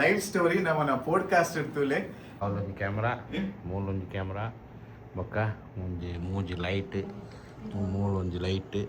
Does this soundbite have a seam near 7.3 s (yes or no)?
no